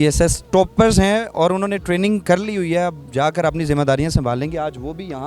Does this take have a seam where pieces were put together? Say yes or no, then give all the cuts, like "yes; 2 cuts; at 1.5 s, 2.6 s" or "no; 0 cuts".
no; 0 cuts